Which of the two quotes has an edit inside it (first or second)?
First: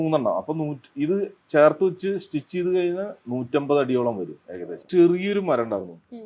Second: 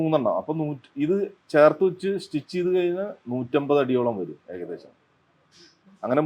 first